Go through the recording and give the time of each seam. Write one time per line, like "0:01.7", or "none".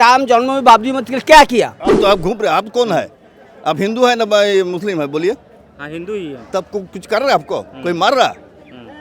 0:01.8